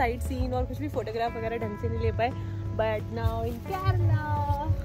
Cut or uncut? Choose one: uncut